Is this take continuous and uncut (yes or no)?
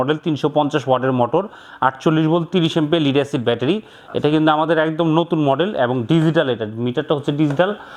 yes